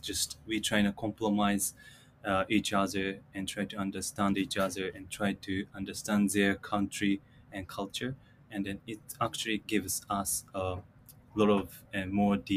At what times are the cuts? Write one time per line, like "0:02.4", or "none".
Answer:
0:09.6

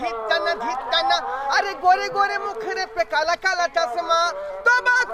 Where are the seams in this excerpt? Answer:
none

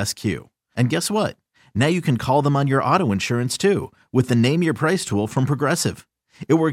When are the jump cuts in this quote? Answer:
none

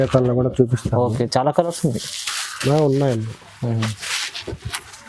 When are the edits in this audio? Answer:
none

